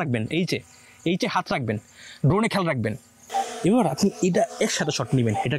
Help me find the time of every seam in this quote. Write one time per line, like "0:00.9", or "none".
0:03.1